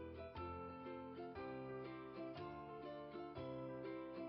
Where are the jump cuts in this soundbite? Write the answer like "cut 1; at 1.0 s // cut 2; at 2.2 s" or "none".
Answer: none